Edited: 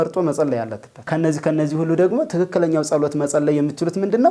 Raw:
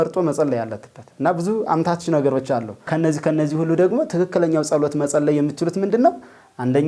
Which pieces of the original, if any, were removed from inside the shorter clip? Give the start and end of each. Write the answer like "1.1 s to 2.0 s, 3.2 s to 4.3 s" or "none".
1.0 s to 2.8 s